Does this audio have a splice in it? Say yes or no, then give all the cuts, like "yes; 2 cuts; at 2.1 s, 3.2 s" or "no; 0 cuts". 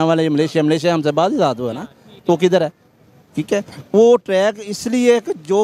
no; 0 cuts